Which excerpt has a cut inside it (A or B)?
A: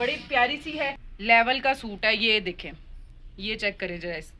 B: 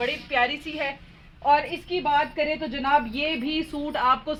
A